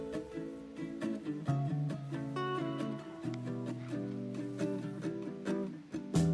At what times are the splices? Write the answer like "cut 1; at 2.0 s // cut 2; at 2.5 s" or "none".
none